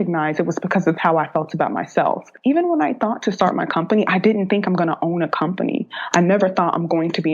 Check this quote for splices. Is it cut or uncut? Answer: cut